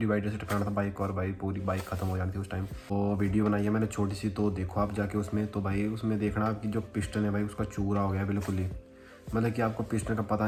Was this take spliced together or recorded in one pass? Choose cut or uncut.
uncut